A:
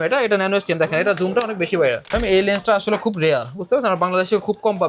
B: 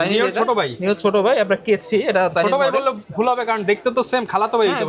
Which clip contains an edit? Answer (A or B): A